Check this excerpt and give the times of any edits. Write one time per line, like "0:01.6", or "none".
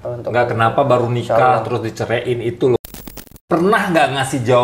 0:02.8